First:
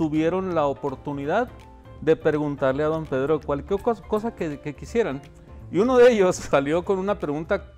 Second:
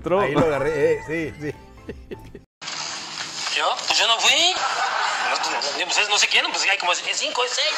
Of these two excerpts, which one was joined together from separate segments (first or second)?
first